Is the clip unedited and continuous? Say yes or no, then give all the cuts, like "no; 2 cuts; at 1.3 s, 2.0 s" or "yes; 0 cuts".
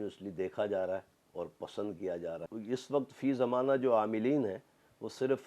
no; 1 cut; at 2.5 s